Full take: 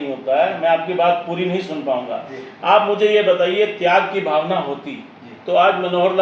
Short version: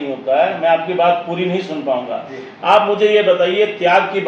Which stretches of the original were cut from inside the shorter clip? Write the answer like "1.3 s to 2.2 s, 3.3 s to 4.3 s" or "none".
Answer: none

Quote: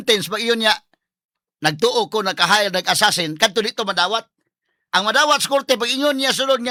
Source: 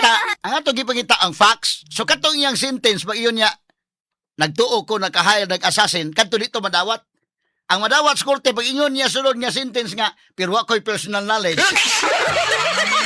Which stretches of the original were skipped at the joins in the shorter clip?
none

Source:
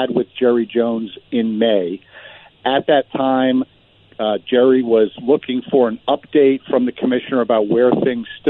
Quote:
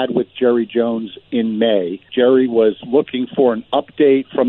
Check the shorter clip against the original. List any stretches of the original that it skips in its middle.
2.1 s to 4.4 s

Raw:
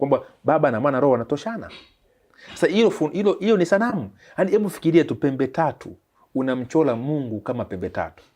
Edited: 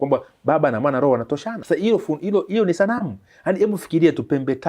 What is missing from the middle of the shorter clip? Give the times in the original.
1.5 s to 2.4 s

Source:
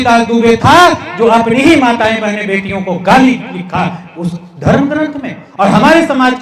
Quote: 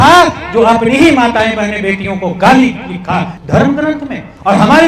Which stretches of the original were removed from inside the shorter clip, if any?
4.0 s to 4.5 s

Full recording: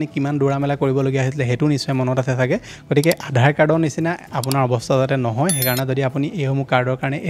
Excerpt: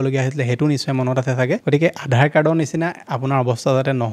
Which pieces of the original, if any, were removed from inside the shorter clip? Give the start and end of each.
2.6 s to 2.9 s

